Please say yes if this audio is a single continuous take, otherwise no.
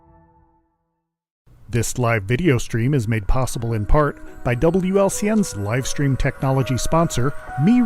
no